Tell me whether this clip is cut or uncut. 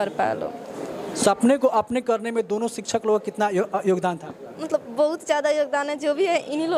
uncut